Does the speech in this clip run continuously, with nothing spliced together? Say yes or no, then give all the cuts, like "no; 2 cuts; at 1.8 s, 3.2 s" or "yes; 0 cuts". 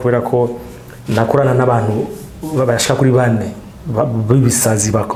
yes; 0 cuts